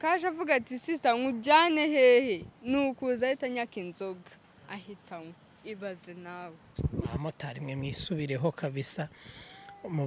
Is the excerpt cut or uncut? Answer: uncut